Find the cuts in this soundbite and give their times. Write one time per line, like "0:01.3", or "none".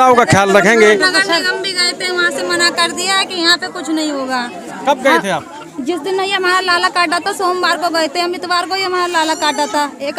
0:01.4